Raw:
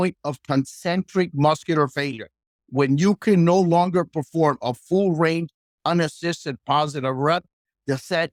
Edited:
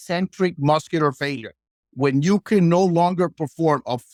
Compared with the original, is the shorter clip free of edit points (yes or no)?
yes